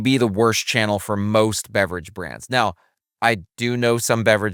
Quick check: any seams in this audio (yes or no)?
no